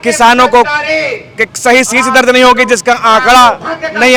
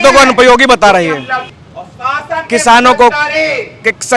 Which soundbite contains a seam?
second; 1 cut; at 1.4 s

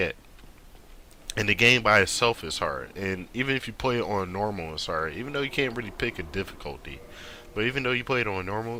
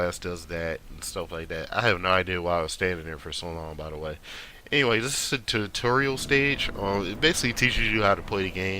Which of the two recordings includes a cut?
second; 1 cut; at 0.9 s

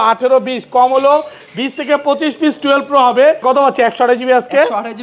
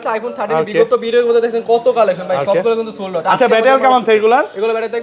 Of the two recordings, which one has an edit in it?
first; 1 cut; at 3.4 s

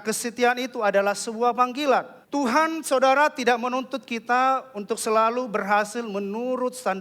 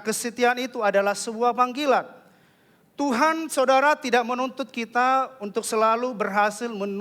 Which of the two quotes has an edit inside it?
first; 1 cut; at 2.2 s

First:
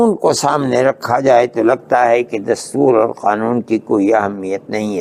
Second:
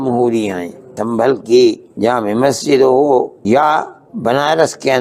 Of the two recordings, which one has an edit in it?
second; 4 cuts; at 1.0 s, 1.9 s, 3.4 s, 4.0 s

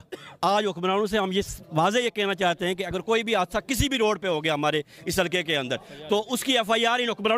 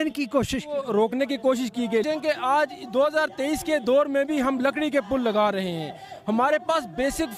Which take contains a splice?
second; 1 cut; at 2.0 s

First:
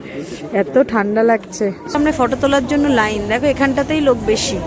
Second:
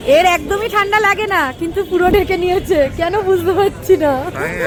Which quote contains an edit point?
first; 1 cut; at 1.9 s

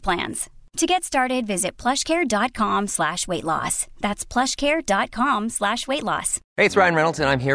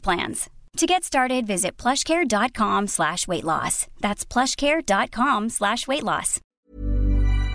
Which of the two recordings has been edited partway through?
second; 1 cut; at 6.4 s

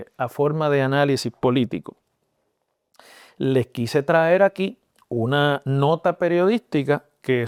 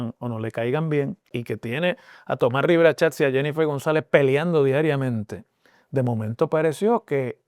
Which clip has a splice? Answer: second; 1 cut; at 1.4 s

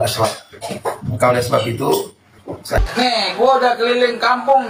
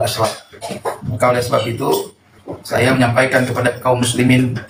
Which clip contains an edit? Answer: first; 1 cut; at 2.8 s

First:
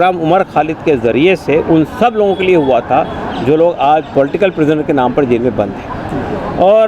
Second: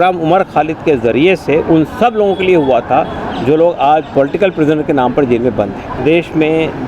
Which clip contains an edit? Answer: second; 1 cut; at 6.0 s

